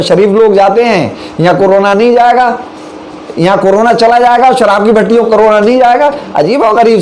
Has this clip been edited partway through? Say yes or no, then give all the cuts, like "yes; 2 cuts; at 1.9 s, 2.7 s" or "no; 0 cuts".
no; 0 cuts